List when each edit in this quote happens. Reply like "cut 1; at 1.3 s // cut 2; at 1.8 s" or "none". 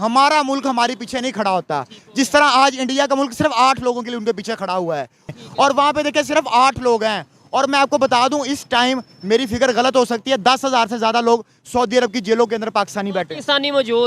cut 1; at 5.3 s